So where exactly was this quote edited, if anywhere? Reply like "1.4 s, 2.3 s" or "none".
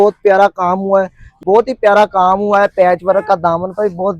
1.2 s